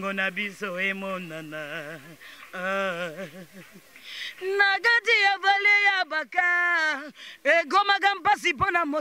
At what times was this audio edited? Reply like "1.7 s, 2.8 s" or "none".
none

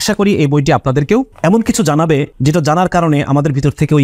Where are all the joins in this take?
1.3 s, 2.3 s

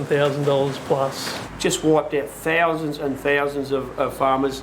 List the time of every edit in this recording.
1.3 s

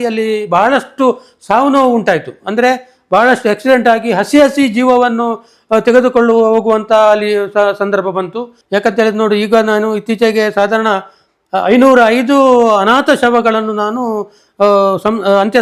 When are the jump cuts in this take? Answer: 8.5 s

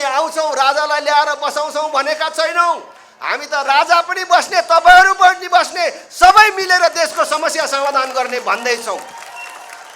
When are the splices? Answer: none

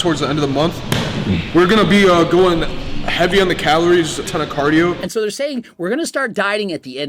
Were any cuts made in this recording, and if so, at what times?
4.3 s, 5.0 s

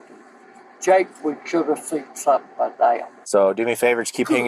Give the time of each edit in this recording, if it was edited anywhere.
3.1 s

